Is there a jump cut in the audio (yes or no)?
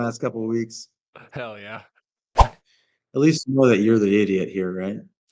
yes